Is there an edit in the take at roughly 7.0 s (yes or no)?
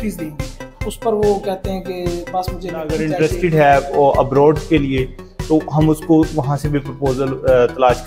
no